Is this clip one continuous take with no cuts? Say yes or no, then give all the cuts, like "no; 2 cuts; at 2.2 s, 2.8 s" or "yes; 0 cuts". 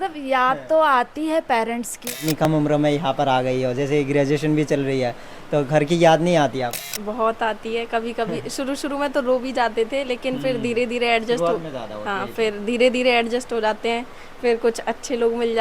no; 2 cuts; at 2.4 s, 6.9 s